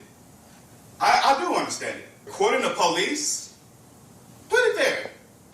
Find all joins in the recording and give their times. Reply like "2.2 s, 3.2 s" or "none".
2.2 s